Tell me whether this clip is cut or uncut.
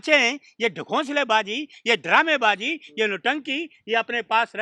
uncut